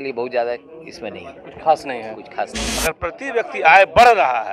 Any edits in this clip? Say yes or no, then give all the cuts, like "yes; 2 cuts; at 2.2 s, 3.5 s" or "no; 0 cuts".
yes; 1 cut; at 2.7 s